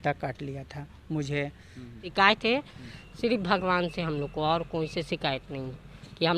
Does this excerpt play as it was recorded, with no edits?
no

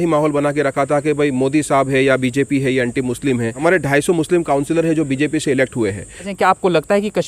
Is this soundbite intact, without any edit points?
no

